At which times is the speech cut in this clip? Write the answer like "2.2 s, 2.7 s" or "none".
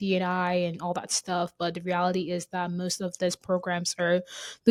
none